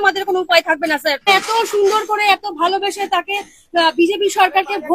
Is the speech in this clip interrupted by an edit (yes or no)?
yes